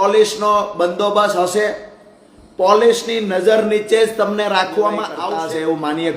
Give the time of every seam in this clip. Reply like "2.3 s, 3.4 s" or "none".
5.2 s